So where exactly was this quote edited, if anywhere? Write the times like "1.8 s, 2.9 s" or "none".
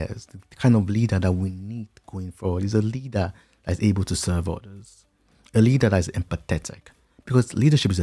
none